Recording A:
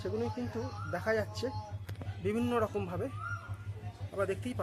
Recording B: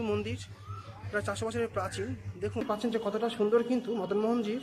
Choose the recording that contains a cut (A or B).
B